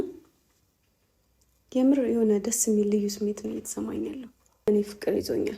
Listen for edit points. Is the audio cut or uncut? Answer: cut